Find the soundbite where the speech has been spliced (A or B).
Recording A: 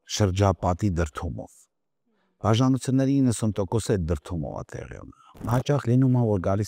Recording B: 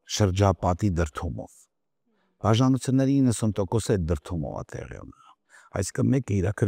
A